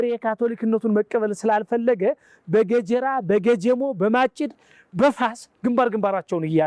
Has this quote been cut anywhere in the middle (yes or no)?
no